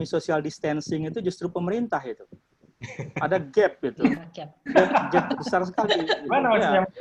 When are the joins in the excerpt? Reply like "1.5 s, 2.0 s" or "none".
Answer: none